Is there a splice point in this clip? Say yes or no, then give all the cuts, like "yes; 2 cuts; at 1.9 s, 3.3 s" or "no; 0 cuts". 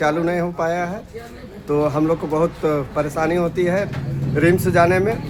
no; 0 cuts